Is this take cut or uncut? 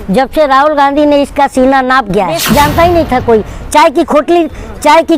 cut